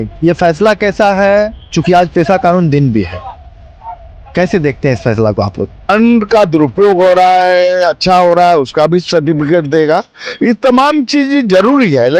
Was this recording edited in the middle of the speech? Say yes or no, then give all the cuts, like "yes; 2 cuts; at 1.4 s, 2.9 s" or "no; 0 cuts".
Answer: yes; 1 cut; at 5.9 s